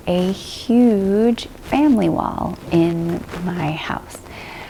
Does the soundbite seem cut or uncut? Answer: uncut